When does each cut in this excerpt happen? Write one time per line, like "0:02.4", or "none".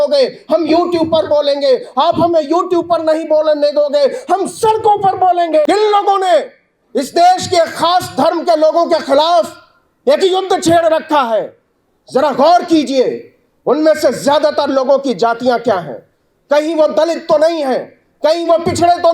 0:05.6